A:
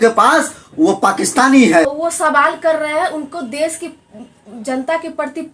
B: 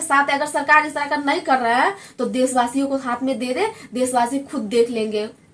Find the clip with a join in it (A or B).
A